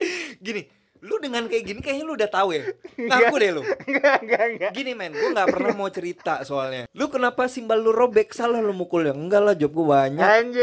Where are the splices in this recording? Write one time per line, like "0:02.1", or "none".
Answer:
0:06.8